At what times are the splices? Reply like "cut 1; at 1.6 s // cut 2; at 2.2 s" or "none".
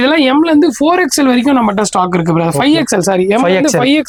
none